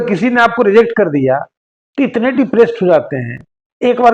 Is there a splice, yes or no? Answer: no